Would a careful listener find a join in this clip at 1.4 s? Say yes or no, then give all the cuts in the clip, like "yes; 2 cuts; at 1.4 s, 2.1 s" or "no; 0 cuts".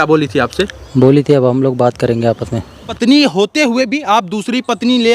no; 1 cut; at 2.9 s